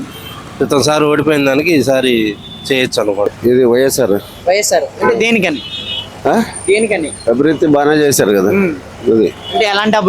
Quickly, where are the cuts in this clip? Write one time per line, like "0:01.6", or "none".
0:03.3